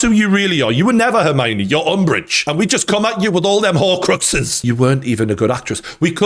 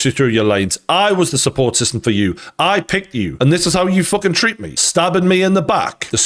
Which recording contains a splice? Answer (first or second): first